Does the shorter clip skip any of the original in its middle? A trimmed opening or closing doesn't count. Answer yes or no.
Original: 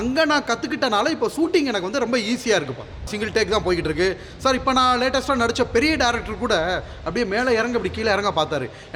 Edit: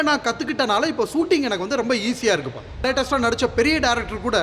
yes